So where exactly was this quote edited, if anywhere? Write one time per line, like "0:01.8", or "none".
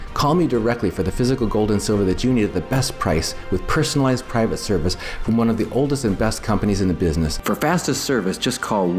0:07.4